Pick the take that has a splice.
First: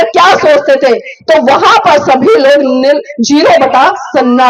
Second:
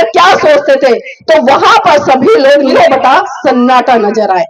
second; 1 cut; at 2.7 s

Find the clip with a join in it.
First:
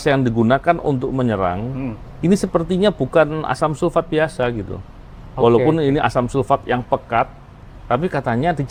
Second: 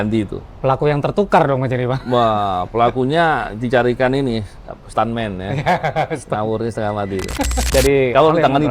second; 1 cut; at 7.7 s

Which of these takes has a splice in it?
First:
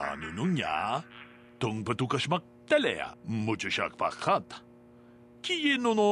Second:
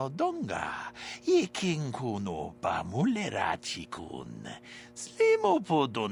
first; 1 cut; at 3.3 s

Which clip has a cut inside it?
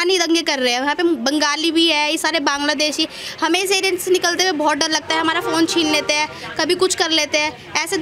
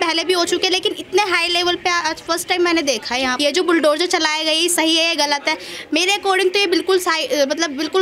second; 1 cut; at 3.3 s

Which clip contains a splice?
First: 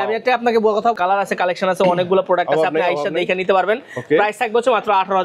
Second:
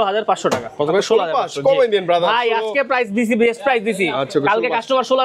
first; 1 cut; at 0.9 s

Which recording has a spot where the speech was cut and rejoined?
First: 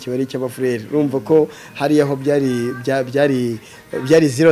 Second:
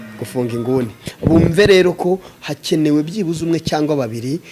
second; 1 cut; at 1.0 s

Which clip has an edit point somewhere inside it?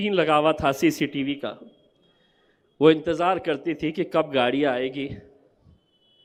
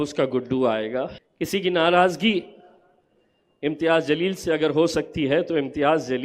second; 1 cut; at 1.2 s

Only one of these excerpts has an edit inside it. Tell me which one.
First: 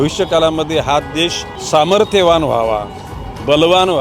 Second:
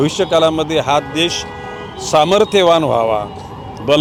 first; 1 cut; at 1.5 s

